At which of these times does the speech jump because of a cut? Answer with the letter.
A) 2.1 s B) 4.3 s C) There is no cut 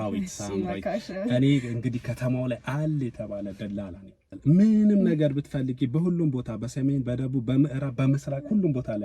B